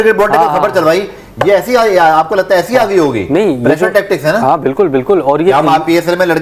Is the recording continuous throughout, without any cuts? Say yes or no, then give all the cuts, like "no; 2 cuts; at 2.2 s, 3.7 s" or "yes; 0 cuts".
yes; 0 cuts